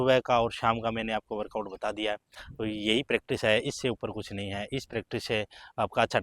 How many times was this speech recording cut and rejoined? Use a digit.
1